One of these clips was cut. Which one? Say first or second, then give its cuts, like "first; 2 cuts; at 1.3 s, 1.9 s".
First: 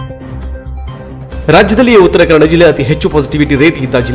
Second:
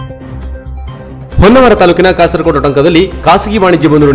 first; 1 cut; at 0.9 s